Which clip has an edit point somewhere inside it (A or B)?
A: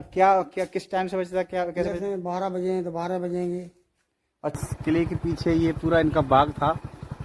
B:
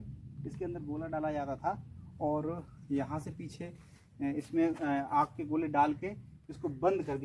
A